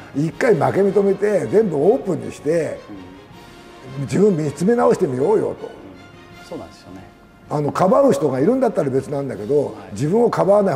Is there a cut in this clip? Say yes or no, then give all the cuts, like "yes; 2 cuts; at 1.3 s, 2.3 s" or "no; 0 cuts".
no; 0 cuts